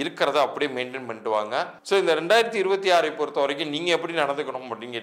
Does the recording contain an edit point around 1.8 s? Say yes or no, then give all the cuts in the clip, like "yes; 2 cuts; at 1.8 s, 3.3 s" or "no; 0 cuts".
yes; 1 cut; at 1.8 s